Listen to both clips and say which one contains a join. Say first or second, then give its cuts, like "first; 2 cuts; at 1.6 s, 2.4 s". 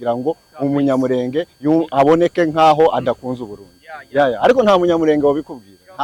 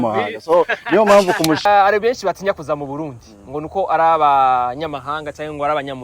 second; 1 cut; at 1.6 s